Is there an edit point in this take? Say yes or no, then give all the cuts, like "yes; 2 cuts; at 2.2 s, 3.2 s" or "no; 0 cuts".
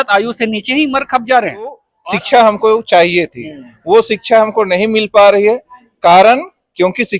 yes; 1 cut; at 1.9 s